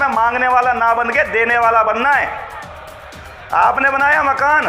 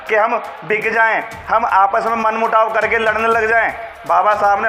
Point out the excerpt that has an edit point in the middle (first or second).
first